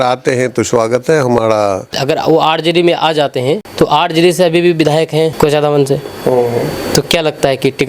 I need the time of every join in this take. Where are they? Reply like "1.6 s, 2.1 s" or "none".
1.9 s, 3.7 s, 5.3 s